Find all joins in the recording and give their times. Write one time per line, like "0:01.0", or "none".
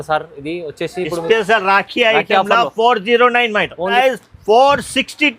0:03.9